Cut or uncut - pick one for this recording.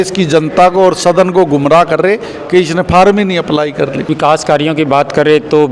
cut